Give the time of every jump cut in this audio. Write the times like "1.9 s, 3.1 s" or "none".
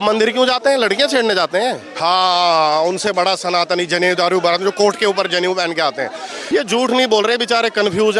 1.9 s, 6.4 s